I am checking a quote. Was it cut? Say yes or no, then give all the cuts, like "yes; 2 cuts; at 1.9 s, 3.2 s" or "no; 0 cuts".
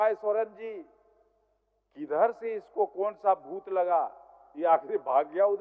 no; 0 cuts